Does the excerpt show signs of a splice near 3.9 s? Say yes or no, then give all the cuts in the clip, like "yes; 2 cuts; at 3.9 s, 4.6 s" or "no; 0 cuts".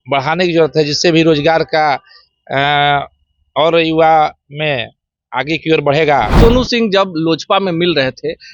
no; 1 cut; at 6.3 s